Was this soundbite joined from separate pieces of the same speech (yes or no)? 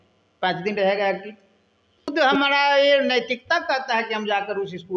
yes